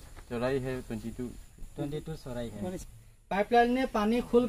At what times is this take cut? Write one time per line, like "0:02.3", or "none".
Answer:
0:03.0

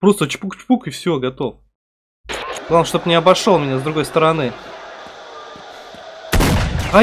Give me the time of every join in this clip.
0:02.6

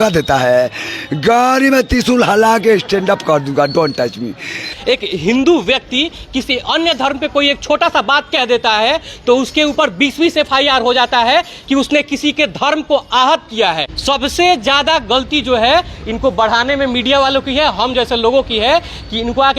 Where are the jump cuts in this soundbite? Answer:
0:04.7
0:13.9

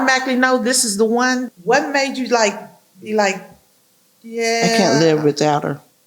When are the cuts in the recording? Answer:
0:01.5

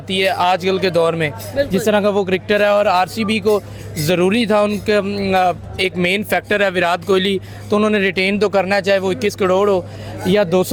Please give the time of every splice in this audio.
none

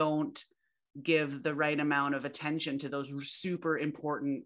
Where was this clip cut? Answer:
none

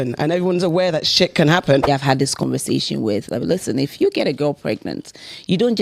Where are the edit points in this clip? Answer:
0:01.9

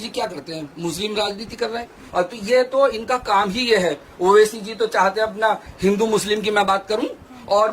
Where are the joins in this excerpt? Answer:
0:01.9

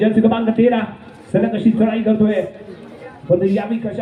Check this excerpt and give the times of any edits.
none

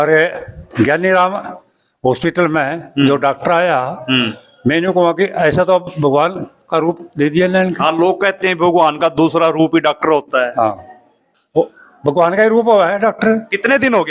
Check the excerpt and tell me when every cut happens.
none

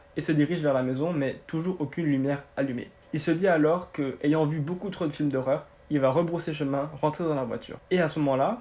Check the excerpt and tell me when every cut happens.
none

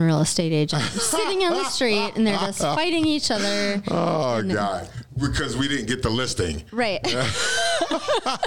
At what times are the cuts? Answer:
none

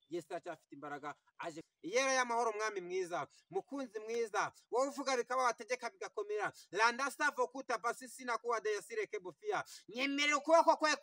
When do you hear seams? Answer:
0:01.6

